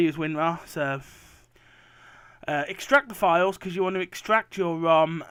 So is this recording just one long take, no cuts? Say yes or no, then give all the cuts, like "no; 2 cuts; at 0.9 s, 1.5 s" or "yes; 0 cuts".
yes; 0 cuts